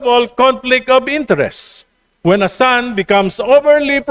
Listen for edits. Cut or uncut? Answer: uncut